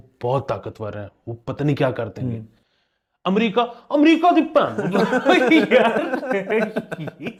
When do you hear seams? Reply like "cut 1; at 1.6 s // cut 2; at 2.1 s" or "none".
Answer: none